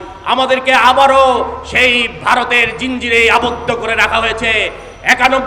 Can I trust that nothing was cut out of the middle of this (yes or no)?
yes